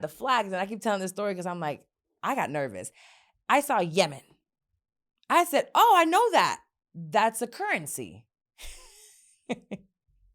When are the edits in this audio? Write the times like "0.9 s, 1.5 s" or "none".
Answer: none